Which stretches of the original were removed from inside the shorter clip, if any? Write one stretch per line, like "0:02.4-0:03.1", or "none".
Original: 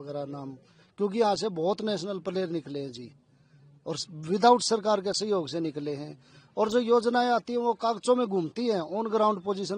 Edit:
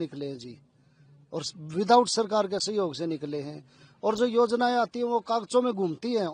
none